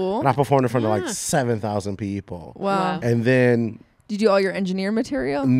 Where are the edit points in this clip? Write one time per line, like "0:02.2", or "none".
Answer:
none